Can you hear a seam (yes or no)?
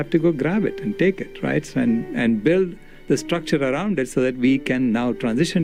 no